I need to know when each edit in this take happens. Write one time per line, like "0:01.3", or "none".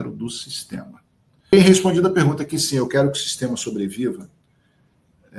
0:01.5